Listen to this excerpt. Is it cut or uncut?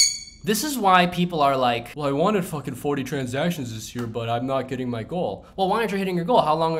cut